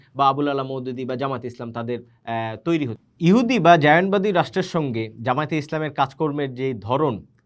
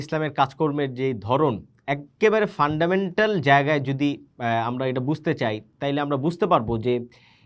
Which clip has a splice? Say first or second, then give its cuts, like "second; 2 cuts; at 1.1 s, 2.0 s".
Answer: first; 1 cut; at 3.0 s